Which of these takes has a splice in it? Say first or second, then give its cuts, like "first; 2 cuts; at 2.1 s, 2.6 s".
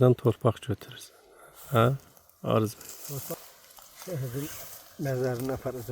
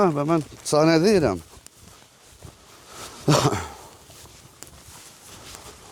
first; 1 cut; at 3.3 s